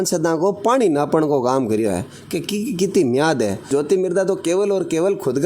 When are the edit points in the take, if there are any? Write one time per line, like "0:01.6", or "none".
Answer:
0:03.7

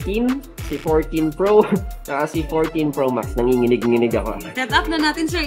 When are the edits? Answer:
0:04.4

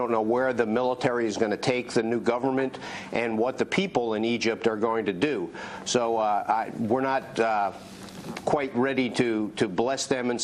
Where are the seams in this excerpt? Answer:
0:01.9

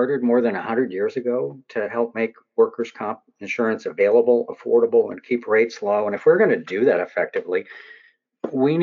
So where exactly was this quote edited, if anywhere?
none

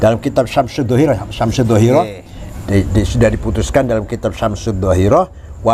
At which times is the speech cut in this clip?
none

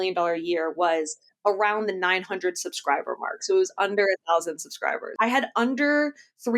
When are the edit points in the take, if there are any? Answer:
0:05.0

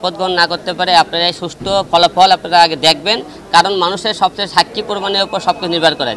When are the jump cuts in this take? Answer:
none

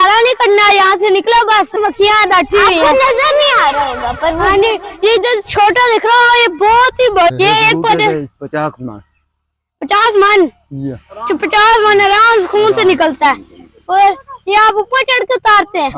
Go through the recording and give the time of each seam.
0:01.7
0:07.3

